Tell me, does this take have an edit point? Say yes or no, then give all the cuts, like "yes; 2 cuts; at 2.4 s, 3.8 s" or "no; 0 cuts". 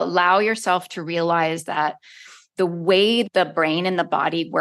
yes; 1 cut; at 3.2 s